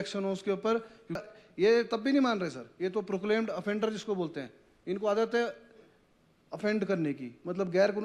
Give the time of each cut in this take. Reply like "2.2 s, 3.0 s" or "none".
1.2 s